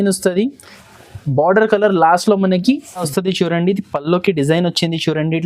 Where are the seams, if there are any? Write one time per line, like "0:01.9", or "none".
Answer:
0:03.0